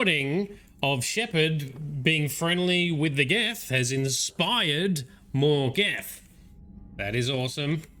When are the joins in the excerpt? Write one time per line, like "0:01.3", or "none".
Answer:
none